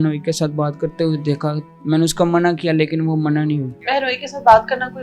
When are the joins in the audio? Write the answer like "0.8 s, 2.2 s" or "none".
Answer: 3.9 s